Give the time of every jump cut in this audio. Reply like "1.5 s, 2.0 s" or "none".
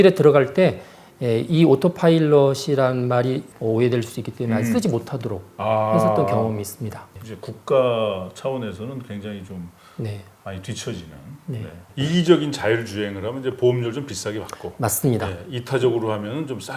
3.5 s, 7.2 s, 11.9 s

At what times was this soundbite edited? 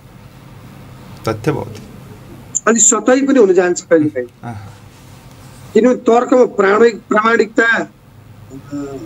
none

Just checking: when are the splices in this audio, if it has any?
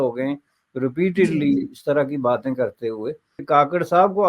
3.3 s

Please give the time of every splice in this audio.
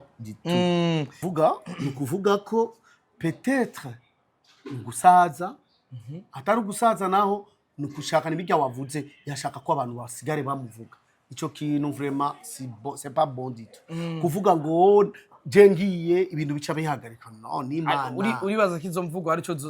none

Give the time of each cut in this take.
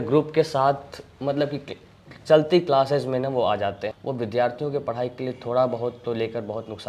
3.9 s

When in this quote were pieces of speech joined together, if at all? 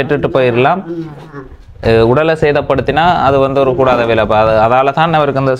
none

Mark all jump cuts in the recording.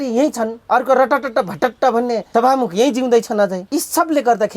2.2 s, 3.6 s

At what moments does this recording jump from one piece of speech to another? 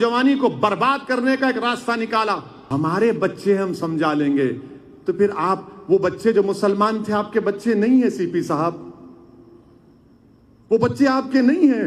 2.5 s

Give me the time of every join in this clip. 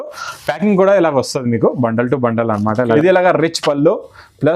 2.9 s

